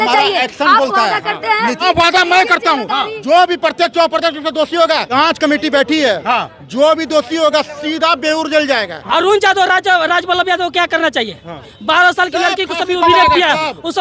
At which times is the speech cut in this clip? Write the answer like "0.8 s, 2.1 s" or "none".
1.8 s, 5.1 s, 9.1 s, 11.7 s

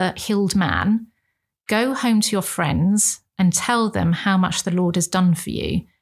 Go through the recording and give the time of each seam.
none

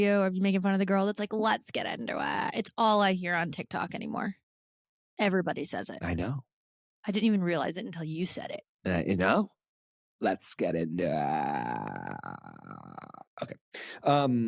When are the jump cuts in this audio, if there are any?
none

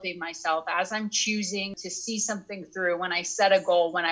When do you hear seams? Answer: 1.8 s

